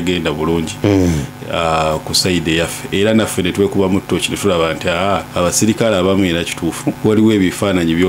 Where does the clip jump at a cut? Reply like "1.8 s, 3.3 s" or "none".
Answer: 5.3 s, 7.0 s